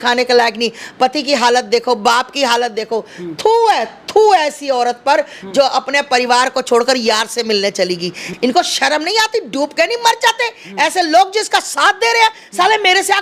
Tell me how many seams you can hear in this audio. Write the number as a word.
one